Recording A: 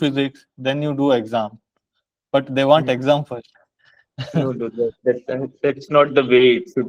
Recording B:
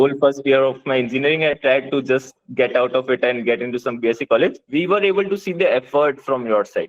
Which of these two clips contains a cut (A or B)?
B